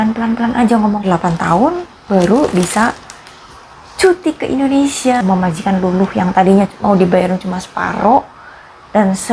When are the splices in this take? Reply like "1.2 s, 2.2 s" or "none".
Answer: 1.0 s, 5.2 s